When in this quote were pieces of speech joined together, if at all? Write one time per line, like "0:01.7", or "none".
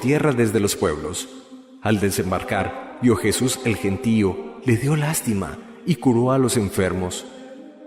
none

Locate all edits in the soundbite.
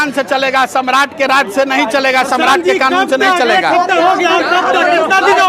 none

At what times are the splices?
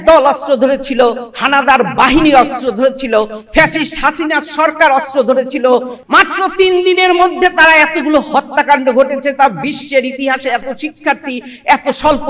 0:05.9

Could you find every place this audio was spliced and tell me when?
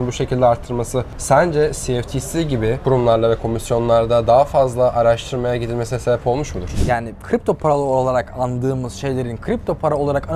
0:01.1
0:02.8
0:06.7

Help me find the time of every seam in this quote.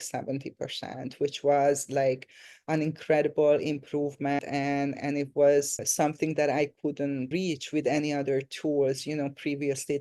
0:04.4
0:05.9
0:07.3

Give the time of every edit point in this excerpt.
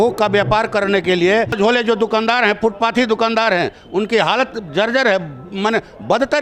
0:01.5

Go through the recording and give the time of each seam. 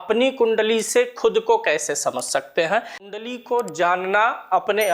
0:03.1

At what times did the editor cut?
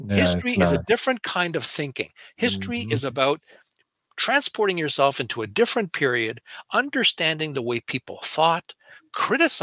none

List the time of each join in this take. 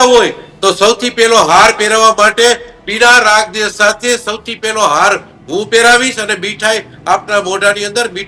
none

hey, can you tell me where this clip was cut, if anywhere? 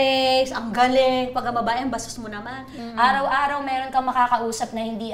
0:02.7

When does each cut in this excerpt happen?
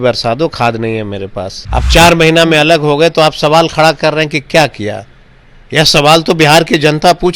0:01.6

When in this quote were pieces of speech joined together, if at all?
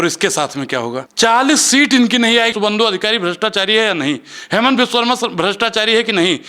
0:01.0
0:02.5

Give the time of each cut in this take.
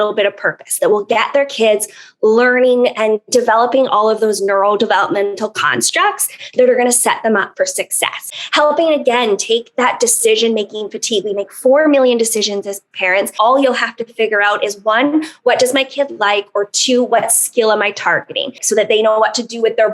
0:08.4
0:13.3
0:18.5

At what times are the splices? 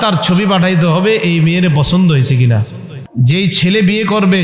0:03.0

